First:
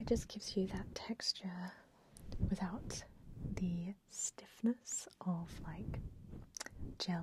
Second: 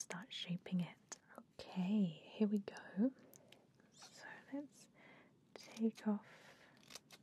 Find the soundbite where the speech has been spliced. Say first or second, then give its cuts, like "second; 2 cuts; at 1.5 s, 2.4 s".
second; 1 cut; at 1.1 s